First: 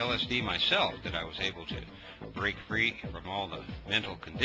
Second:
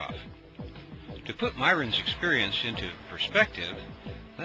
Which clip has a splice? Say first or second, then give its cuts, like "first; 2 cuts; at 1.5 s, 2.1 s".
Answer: second; 1 cut; at 3.0 s